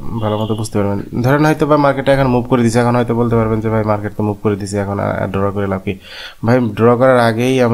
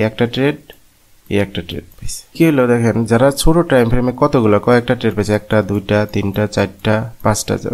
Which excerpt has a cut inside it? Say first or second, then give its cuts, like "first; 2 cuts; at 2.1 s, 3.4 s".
second; 1 cut; at 2.3 s